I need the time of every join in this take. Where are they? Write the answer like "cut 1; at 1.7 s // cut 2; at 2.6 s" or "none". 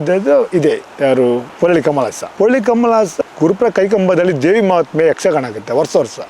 none